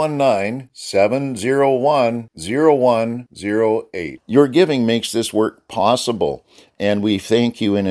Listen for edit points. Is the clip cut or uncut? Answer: uncut